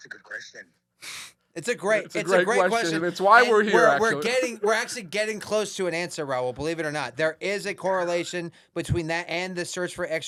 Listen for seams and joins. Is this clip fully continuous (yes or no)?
yes